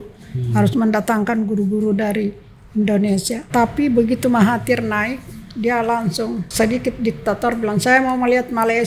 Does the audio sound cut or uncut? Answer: cut